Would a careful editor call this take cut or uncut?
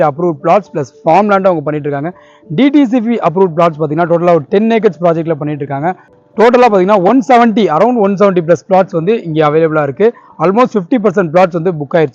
uncut